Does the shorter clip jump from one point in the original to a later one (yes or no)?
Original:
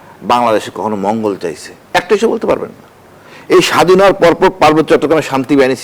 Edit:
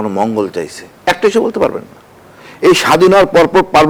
no